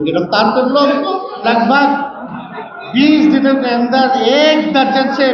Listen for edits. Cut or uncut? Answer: cut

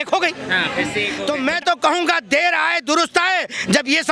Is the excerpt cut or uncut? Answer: cut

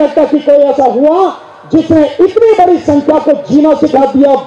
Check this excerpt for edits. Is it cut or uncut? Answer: uncut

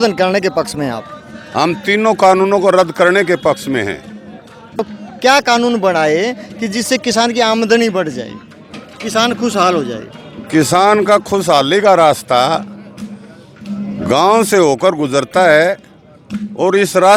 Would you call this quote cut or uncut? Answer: uncut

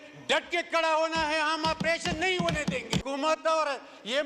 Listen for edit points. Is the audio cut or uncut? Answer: cut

